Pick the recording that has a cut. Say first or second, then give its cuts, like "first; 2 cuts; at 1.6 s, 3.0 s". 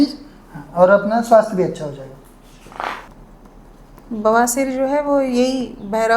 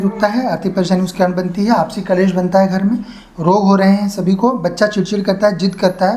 first; 1 cut; at 3.1 s